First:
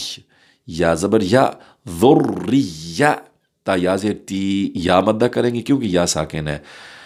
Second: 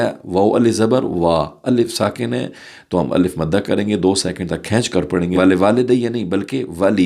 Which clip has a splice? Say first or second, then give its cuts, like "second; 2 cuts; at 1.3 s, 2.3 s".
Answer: second; 1 cut; at 5.3 s